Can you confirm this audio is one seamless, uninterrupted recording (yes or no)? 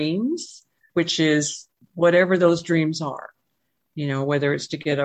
yes